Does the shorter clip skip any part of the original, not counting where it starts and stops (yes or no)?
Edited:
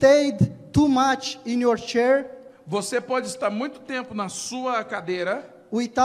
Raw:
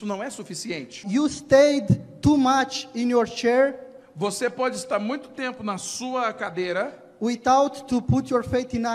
no